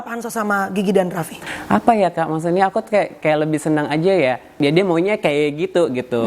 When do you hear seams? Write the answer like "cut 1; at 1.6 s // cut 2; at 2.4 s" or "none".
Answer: cut 1; at 1.5 s // cut 2; at 4.6 s

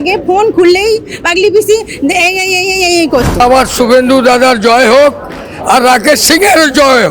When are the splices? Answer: cut 1; at 3.4 s

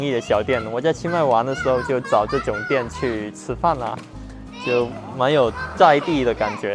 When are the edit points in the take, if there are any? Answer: none

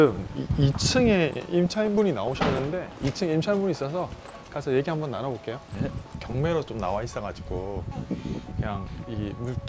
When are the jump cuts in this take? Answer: cut 1; at 6.1 s

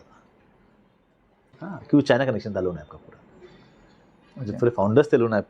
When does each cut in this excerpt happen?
cut 1; at 1.5 s

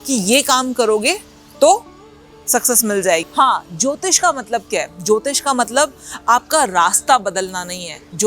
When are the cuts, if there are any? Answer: cut 1; at 3.3 s

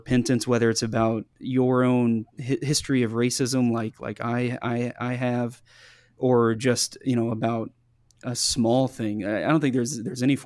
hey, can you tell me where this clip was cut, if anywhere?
cut 1; at 1.3 s // cut 2; at 2.3 s

